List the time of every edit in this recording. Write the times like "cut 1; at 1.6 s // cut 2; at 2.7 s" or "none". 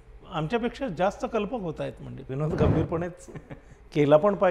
cut 1; at 2.2 s

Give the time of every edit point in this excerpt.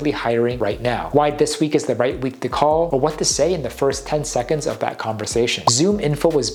none

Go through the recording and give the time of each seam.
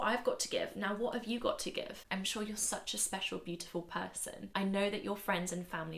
cut 1; at 2.0 s // cut 2; at 4.4 s

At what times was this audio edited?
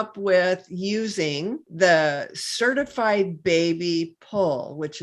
cut 1; at 1.6 s

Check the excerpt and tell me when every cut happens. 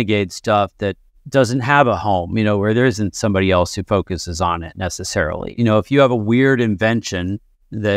cut 1; at 5.5 s

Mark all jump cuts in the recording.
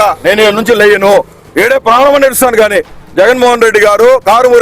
cut 1; at 1.4 s

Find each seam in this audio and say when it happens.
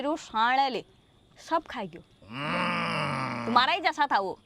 none

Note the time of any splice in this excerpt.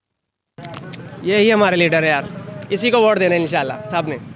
none

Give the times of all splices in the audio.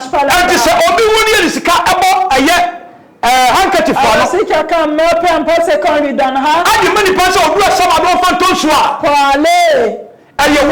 none

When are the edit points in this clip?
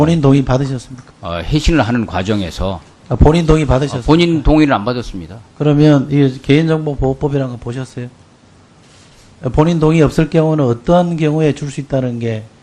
none

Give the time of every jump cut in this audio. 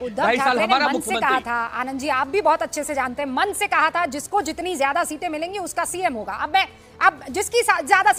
none

